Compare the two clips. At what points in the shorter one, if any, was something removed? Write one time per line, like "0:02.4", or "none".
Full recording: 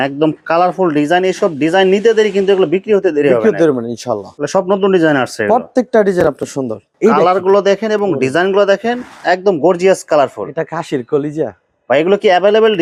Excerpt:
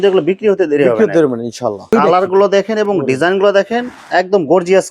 0:01.8